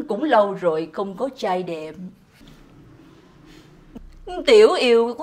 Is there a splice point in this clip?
yes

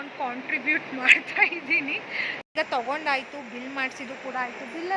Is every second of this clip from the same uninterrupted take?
no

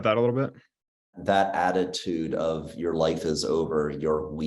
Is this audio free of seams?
no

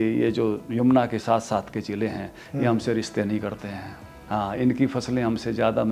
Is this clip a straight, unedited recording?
no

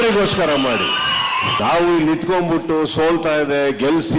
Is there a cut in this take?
yes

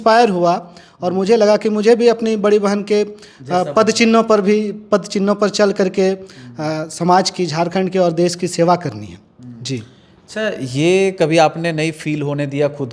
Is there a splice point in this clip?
no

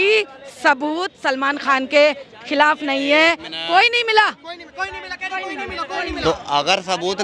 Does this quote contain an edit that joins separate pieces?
no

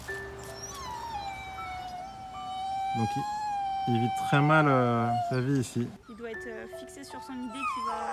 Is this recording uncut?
no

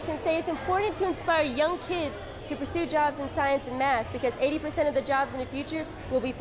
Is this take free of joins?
yes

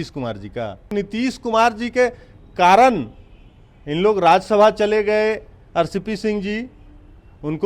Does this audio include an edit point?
yes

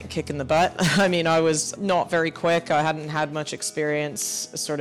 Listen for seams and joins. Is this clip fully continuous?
no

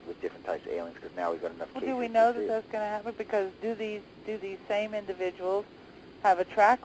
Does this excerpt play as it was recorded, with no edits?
no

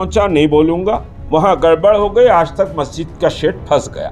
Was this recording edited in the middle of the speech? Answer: yes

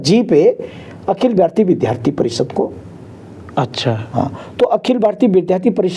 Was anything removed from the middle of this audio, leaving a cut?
no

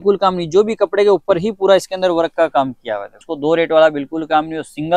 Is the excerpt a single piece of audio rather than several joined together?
no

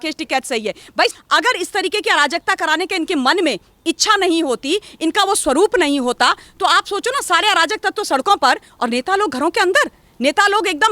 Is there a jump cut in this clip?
yes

